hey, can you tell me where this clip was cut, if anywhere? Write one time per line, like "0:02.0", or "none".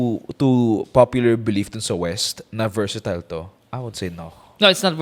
none